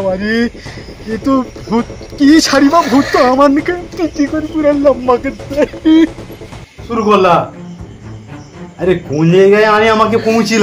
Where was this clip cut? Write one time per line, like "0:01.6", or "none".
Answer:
0:06.6